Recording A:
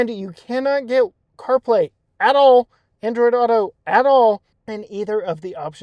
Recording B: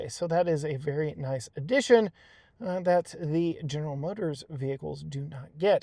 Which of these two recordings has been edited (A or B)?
A